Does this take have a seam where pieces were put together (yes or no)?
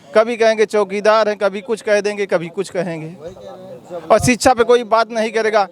no